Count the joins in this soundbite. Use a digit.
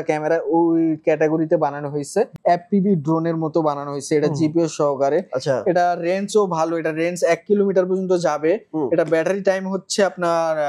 1